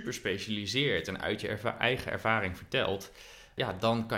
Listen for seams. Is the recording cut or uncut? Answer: uncut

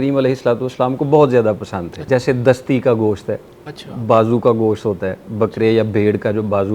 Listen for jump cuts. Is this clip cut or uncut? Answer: cut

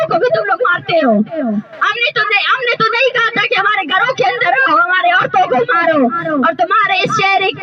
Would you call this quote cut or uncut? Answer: uncut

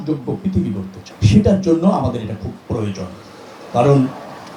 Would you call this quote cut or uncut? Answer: uncut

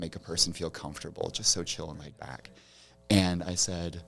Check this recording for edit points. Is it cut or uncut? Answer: uncut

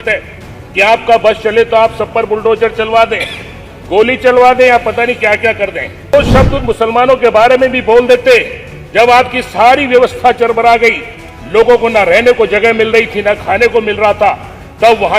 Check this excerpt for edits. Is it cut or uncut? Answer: cut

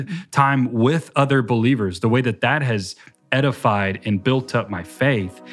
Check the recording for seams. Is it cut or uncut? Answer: uncut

